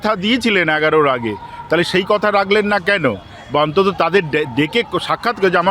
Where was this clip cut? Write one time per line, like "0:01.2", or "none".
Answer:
none